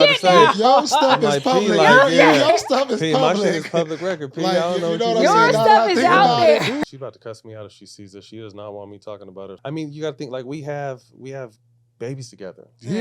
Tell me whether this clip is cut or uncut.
cut